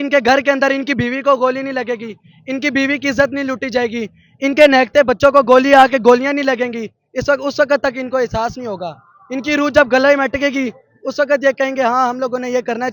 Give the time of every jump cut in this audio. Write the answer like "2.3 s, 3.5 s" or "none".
none